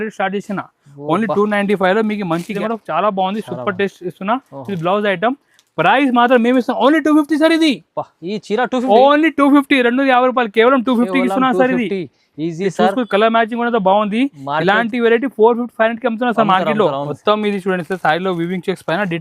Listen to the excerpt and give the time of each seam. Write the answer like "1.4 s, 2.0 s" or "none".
2.6 s, 17.1 s